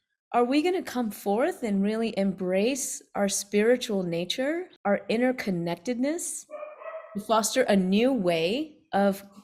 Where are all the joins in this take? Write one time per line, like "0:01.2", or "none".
0:04.7